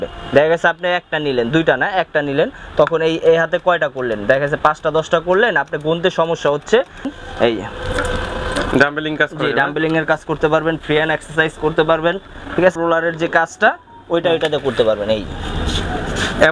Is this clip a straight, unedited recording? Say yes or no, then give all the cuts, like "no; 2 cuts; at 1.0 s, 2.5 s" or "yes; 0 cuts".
no; 2 cuts; at 7.1 s, 12.7 s